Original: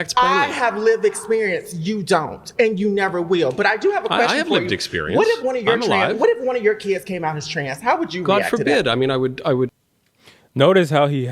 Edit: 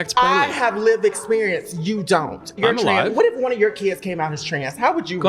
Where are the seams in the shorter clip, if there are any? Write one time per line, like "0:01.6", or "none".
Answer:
0:02.5